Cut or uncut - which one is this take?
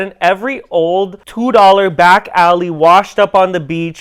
uncut